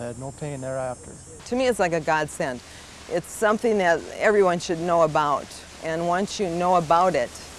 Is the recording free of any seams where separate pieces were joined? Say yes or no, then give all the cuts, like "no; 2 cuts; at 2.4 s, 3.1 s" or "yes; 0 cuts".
no; 1 cut; at 1.4 s